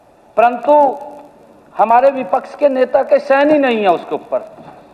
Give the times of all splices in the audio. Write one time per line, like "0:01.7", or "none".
none